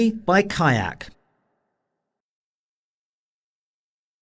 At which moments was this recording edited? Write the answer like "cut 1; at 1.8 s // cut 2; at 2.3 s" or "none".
none